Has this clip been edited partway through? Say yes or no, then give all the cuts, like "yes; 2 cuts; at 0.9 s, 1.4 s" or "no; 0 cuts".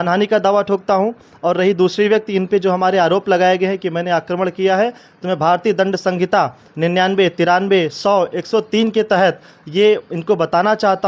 no; 0 cuts